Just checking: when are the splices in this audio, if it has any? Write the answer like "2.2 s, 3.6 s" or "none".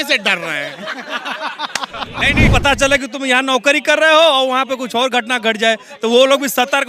2.5 s